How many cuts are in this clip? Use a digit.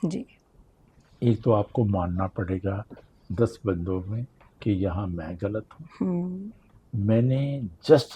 0